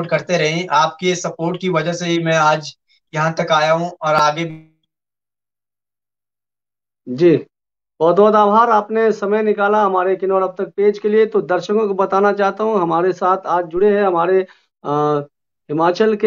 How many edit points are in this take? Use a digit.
0